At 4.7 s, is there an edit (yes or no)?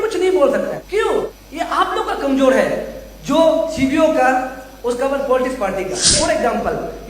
no